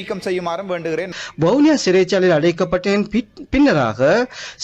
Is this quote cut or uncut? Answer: uncut